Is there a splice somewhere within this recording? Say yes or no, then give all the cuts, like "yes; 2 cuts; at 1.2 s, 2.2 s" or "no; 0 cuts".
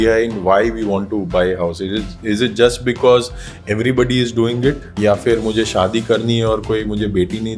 yes; 1 cut; at 4.9 s